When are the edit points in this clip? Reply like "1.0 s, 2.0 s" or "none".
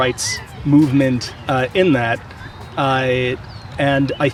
none